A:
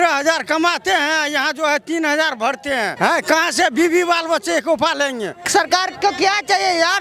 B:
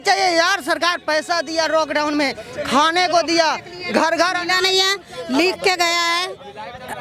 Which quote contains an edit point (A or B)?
A